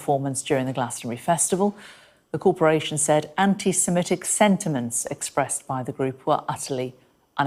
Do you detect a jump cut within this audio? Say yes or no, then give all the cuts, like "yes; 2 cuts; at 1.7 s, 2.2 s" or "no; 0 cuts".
no; 0 cuts